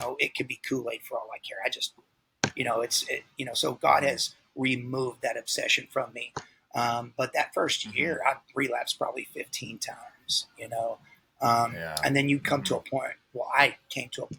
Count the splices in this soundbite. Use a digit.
0